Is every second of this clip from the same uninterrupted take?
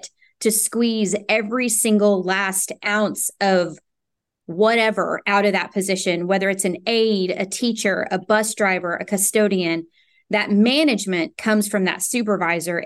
yes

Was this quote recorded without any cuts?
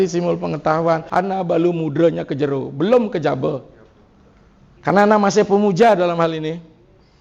no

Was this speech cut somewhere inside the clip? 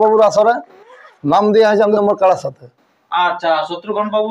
yes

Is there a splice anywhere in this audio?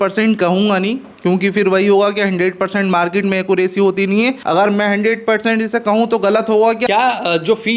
yes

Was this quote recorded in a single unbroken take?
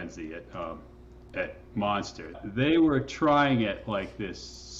no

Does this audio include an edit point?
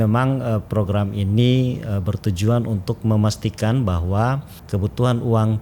yes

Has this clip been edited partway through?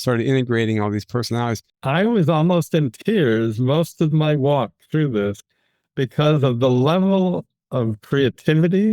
yes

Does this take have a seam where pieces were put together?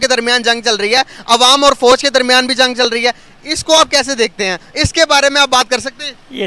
no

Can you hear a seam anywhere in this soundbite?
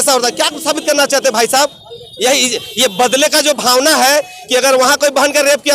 no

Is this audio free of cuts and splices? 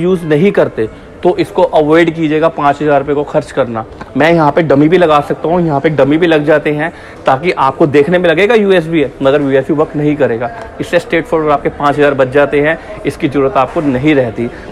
yes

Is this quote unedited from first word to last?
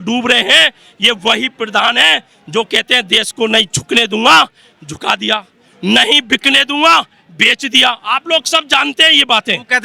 yes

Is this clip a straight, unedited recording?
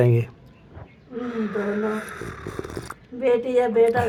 yes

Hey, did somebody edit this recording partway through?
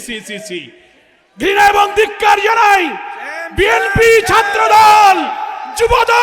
no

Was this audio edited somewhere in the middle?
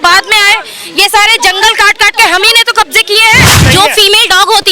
yes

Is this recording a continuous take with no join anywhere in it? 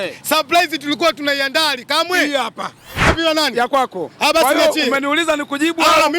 no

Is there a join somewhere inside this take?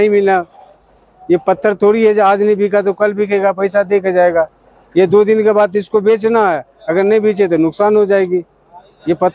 no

